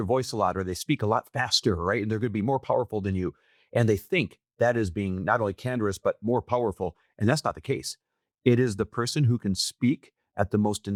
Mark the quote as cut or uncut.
uncut